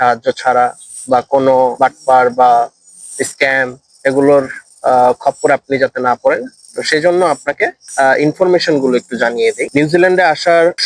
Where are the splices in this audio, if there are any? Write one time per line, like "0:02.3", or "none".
none